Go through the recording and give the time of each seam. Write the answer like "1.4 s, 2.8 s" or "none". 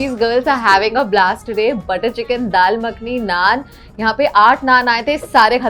none